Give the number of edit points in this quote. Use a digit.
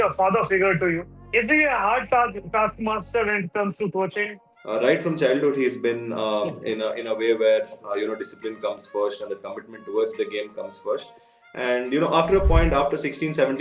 2